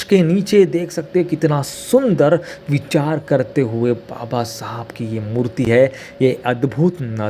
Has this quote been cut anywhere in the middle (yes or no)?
no